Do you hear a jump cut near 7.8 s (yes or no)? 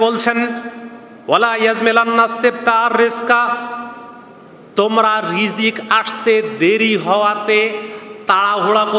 no